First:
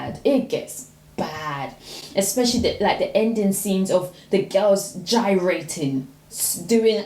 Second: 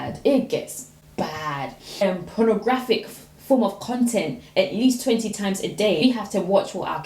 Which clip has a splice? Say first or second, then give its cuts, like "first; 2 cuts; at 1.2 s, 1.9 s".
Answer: second; 2 cuts; at 2.0 s, 6.0 s